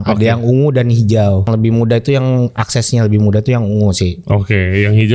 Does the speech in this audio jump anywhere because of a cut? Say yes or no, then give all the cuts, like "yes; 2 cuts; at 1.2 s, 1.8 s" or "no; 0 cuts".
yes; 1 cut; at 1.4 s